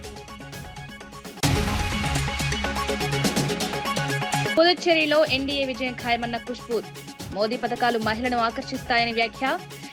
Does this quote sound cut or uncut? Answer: cut